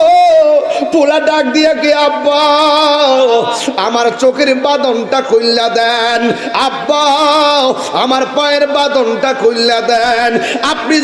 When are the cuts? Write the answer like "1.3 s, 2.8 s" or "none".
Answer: none